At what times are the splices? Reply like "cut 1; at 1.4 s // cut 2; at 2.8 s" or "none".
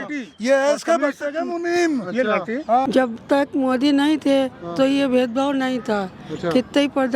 cut 1; at 2.8 s